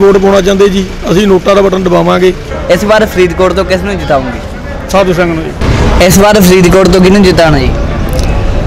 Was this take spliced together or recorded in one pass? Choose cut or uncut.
cut